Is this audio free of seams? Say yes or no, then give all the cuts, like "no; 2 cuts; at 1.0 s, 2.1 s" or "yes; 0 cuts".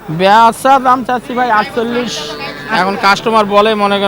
yes; 0 cuts